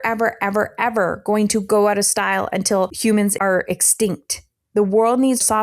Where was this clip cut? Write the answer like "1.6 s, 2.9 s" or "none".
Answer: 4.5 s